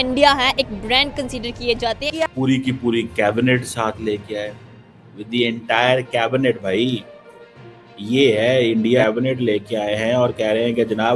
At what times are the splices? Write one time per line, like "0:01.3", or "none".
0:02.0
0:09.0